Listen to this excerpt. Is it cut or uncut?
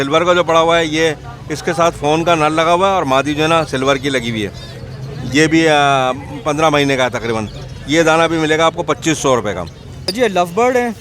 cut